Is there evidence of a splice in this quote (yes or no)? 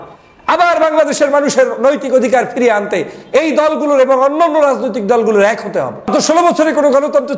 yes